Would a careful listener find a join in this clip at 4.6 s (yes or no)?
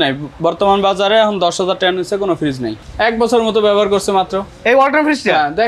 no